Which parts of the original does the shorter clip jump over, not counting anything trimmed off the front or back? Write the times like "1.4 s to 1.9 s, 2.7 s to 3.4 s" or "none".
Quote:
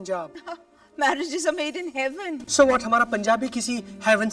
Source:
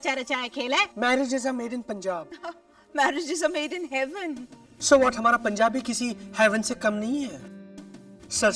4.3 s to 4.7 s